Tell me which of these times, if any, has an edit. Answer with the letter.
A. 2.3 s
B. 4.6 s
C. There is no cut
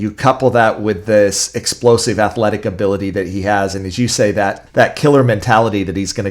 B